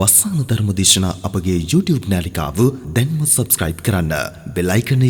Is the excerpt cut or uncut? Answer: uncut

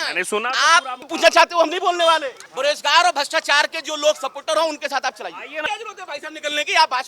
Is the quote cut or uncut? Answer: cut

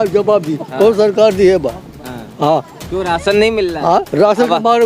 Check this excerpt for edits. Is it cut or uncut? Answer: uncut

